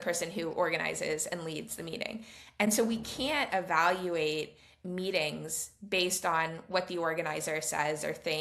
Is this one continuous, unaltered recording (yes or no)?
yes